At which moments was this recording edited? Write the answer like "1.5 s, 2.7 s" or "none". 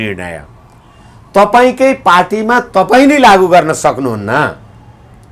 none

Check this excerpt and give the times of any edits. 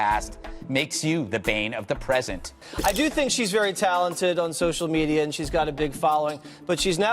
2.7 s

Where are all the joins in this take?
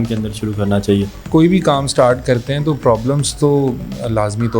1.3 s

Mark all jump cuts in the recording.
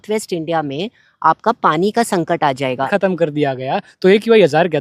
2.9 s

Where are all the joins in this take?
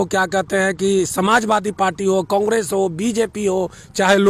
none

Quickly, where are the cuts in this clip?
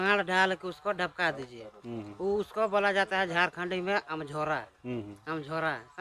none

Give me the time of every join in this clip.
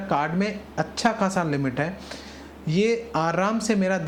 none

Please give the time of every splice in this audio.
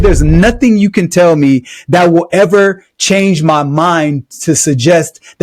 none

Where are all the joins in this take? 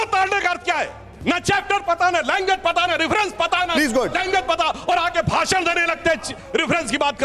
1.0 s

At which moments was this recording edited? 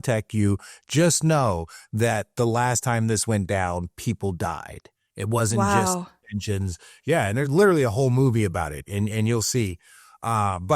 none

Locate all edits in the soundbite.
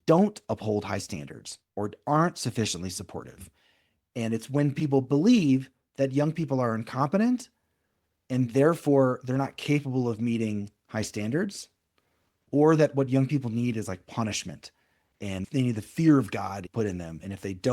15.4 s, 16.6 s

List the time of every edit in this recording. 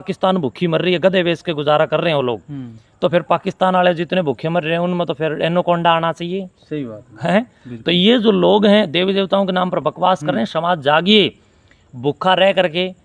none

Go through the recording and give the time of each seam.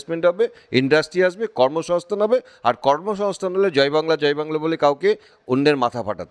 none

